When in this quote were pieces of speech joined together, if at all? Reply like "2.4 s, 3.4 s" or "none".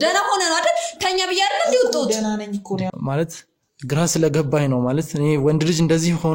2.9 s